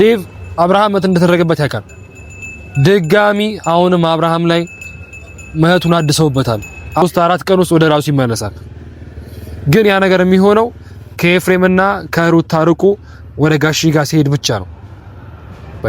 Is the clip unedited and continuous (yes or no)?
no